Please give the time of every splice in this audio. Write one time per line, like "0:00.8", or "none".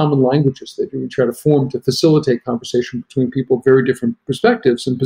none